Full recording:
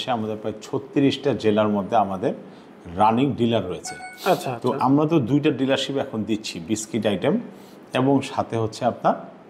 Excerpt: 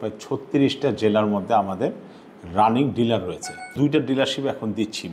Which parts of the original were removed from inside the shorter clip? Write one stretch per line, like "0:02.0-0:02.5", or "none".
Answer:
0:04.2-0:05.3